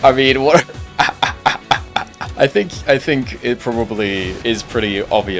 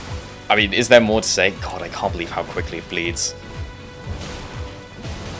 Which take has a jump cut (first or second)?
first